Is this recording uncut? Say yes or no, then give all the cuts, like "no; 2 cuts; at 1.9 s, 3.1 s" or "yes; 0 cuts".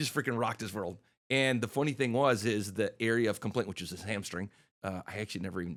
yes; 0 cuts